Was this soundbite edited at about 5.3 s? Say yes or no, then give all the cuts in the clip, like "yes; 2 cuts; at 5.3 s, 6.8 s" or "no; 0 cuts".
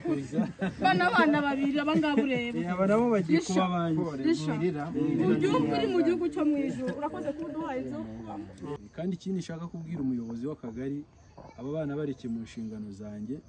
no; 1 cut; at 8.8 s